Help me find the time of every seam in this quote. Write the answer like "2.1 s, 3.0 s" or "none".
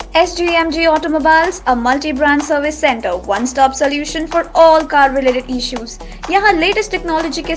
none